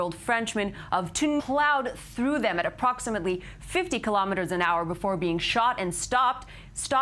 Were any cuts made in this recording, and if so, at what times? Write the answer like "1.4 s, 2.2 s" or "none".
none